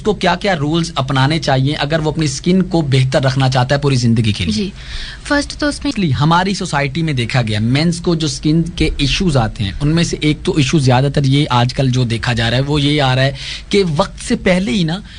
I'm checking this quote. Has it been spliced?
yes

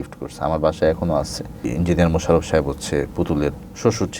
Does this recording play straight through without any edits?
no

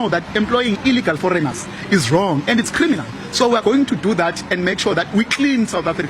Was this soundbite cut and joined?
no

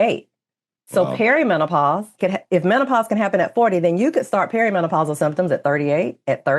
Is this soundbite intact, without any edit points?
no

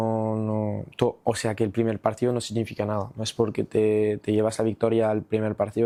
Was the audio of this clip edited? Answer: no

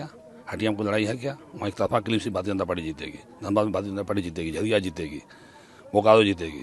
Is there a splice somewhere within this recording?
no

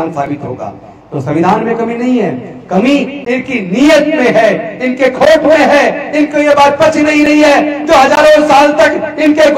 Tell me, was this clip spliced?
no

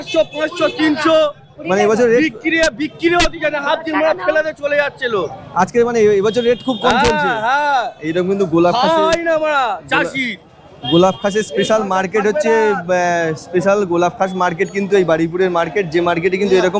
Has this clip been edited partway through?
no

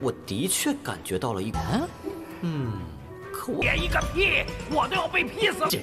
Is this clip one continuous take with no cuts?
yes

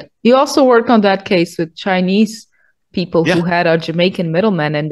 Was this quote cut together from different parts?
no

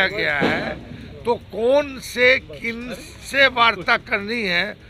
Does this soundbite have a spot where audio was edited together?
no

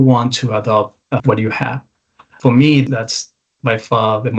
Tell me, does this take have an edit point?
yes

